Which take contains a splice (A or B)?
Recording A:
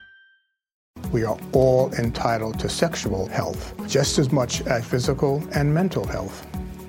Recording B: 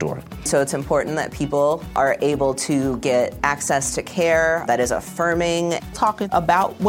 A